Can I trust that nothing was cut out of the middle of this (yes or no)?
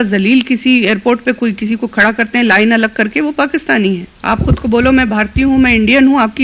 no